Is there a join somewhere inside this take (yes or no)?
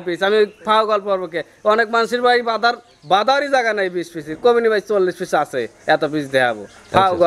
no